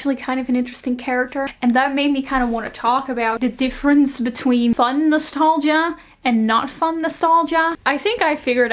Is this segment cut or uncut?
cut